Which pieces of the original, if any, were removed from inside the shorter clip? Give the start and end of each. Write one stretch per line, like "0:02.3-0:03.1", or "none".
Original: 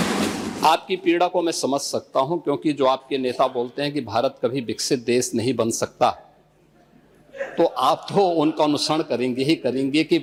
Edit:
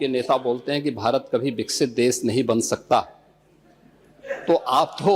none